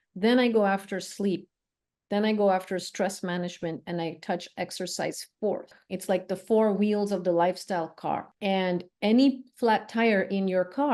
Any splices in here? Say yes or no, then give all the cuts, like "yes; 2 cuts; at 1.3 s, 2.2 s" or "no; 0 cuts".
yes; 2 cuts; at 5.7 s, 8.3 s